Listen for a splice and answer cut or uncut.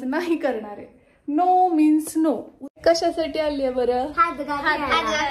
cut